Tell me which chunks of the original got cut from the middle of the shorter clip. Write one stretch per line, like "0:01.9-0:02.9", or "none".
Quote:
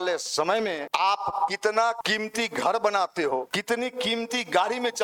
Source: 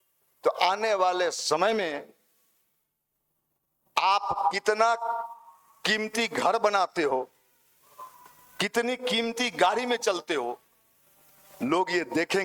0:02.0-0:03.9
0:05.0-0:05.8
0:07.3-0:08.6